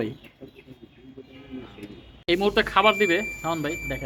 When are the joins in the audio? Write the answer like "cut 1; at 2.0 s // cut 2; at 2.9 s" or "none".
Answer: cut 1; at 2.1 s